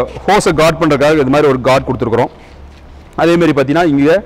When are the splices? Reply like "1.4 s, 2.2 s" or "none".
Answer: none